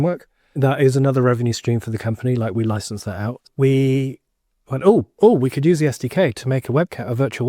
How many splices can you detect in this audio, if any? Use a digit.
1